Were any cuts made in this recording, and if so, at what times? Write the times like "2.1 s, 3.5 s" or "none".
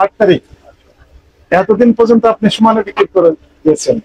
none

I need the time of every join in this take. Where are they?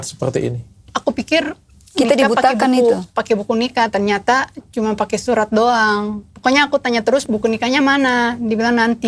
6.2 s, 7.2 s

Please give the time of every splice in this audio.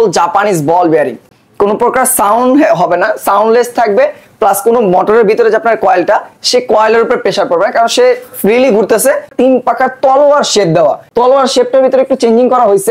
1.3 s, 9.3 s, 11.0 s

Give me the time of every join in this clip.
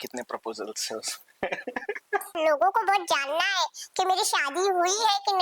2.3 s

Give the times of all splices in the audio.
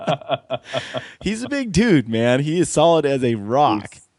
none

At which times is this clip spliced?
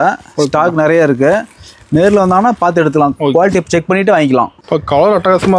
4.6 s

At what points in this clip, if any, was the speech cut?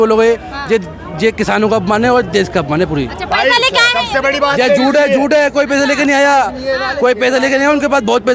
none

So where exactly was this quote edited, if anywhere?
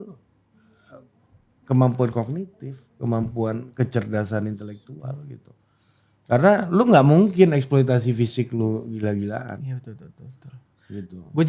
none

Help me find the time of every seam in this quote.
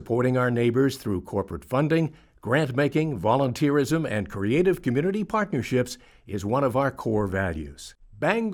none

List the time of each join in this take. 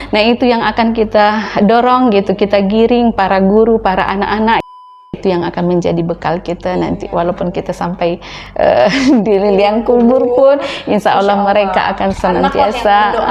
4.8 s

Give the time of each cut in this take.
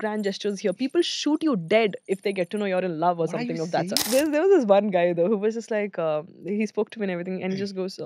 4.1 s

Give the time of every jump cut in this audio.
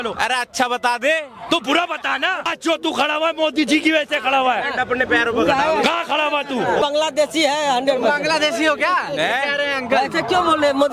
2.5 s, 6.8 s

